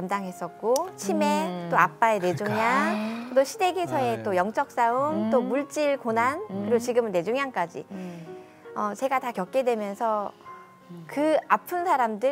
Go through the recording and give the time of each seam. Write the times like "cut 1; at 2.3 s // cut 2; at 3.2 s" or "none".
none